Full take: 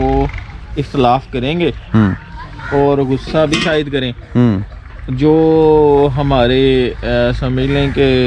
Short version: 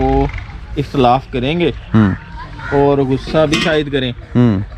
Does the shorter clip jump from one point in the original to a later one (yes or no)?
no